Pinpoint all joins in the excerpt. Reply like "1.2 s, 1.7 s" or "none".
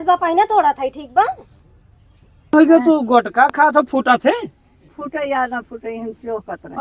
2.5 s